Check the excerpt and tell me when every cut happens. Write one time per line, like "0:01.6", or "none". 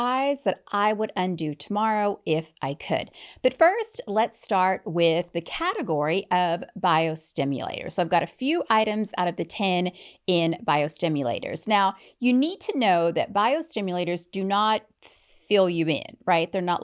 none